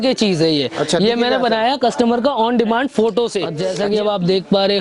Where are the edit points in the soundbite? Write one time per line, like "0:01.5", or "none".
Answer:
0:03.6